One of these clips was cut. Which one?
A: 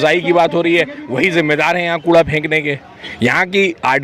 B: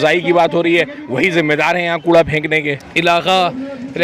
B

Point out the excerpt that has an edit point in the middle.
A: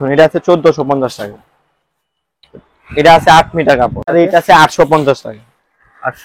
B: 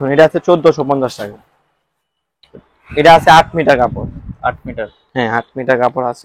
A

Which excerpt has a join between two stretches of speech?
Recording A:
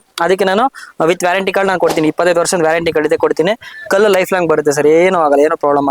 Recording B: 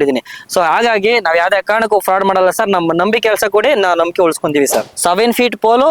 B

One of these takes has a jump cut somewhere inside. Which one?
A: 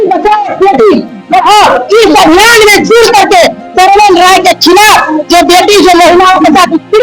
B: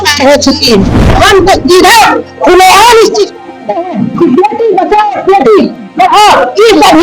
B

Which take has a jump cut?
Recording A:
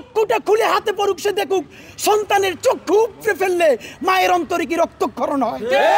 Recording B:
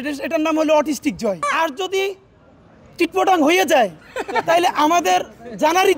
B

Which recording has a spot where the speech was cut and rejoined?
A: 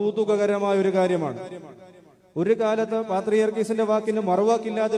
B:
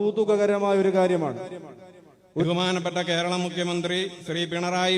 B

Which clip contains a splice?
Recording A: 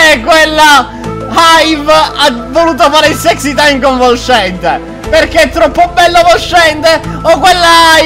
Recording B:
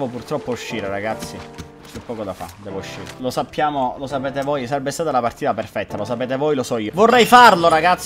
B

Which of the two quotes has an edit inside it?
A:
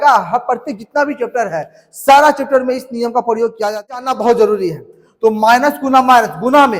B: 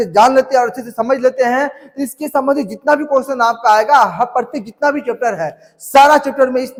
A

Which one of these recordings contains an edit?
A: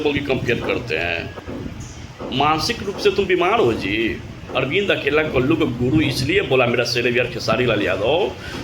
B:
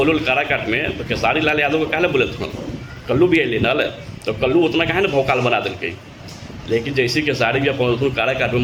A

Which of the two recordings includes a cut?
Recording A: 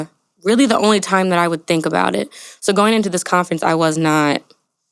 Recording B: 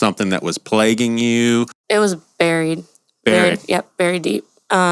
B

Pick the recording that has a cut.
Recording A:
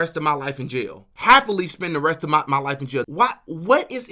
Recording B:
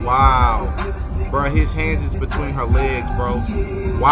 A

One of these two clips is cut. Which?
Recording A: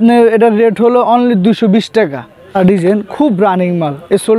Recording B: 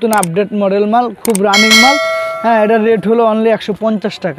A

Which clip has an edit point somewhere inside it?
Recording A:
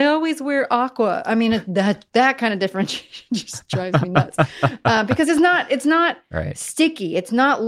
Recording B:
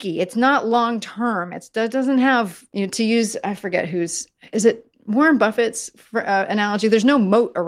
B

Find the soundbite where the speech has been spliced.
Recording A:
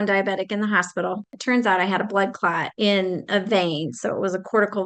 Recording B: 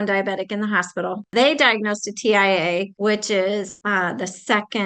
A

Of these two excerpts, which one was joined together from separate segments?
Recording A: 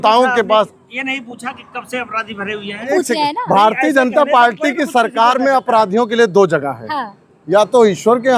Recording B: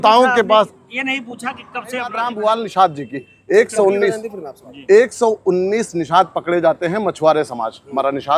B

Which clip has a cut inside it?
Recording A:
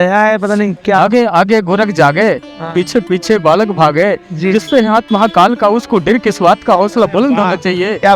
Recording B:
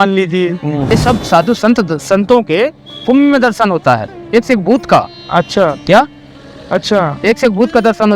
B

